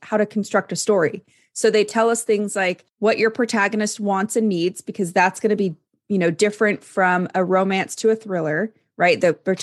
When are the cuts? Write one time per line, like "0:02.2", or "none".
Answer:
0:02.8